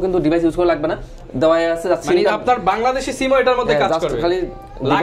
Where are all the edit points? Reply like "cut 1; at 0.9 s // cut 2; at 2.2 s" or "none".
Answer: none